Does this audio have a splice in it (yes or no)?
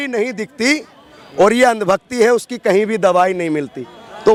no